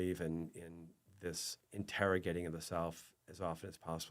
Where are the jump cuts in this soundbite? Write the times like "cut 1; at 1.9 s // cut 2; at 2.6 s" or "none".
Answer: cut 1; at 1.5 s